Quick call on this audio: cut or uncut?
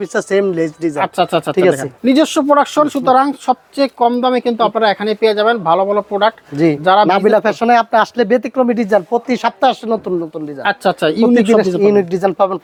uncut